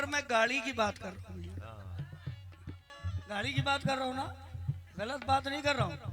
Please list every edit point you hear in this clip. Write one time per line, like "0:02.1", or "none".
0:02.9